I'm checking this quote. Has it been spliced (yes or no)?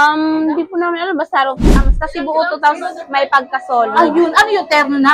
yes